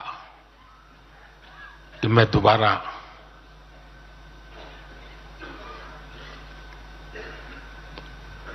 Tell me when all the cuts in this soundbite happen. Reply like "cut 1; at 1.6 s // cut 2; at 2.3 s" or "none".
none

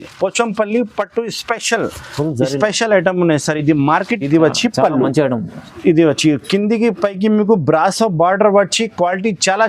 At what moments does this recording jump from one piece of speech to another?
cut 1; at 4.2 s

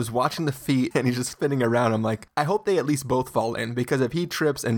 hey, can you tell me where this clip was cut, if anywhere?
cut 1; at 0.9 s // cut 2; at 2.2 s

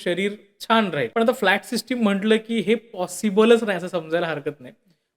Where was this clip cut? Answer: cut 1; at 1.1 s

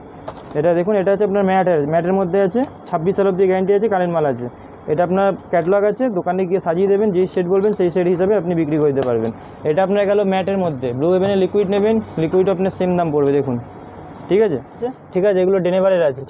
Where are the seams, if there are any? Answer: cut 1; at 14.9 s

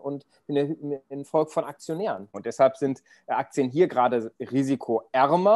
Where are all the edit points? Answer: cut 1; at 2.3 s

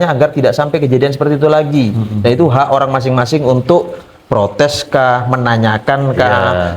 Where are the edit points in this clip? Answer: none

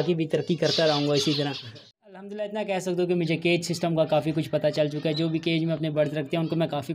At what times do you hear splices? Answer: cut 1; at 1.9 s

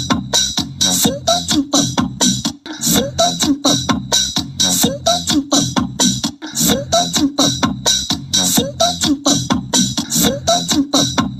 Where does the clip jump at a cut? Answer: cut 1; at 2.4 s // cut 2; at 6.4 s // cut 3; at 9.8 s

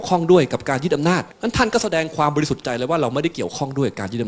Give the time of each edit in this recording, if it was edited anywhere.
cut 1; at 1.3 s

